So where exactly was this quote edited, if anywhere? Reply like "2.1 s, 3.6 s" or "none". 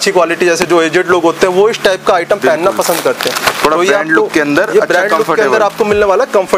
none